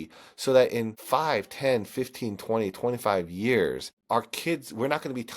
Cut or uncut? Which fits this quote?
cut